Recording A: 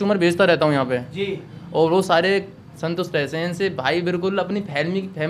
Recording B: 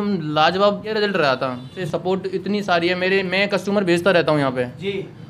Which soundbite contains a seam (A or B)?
B